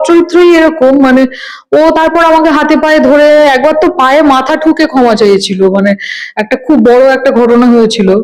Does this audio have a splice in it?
no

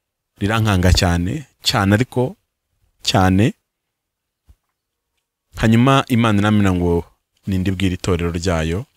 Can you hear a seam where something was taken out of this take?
no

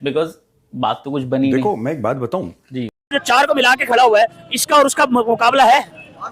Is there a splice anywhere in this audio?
yes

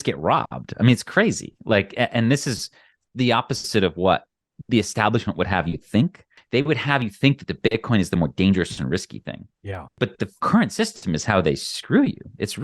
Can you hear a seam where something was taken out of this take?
yes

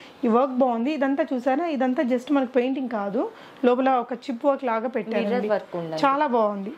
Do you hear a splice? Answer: no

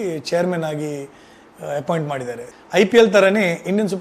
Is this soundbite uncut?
no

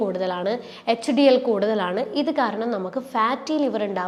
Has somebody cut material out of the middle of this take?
no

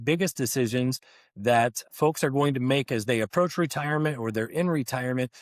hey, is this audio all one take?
yes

